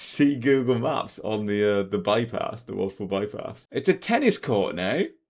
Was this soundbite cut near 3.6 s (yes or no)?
yes